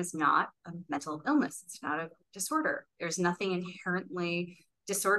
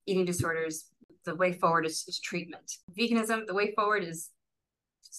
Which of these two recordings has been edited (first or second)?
second